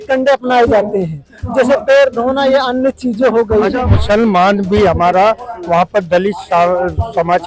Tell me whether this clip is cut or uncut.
cut